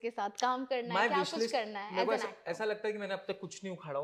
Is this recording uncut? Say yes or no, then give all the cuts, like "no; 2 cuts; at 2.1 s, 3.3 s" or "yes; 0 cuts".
yes; 0 cuts